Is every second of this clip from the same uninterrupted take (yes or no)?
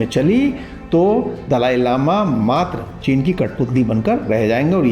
yes